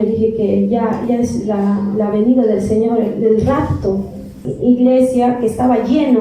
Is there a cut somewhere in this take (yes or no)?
yes